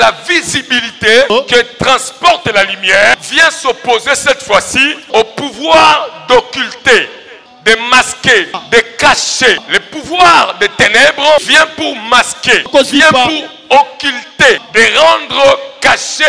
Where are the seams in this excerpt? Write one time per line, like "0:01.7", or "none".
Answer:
0:01.3
0:03.2
0:05.1
0:07.4
0:08.6
0:09.6
0:11.5
0:12.7
0:14.6